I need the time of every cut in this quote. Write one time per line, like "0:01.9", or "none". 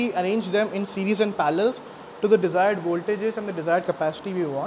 none